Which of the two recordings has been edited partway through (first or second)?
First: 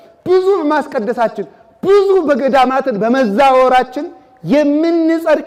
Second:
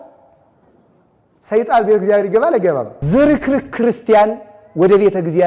second